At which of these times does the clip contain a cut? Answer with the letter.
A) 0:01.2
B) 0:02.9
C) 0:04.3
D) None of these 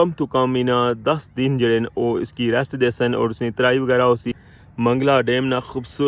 C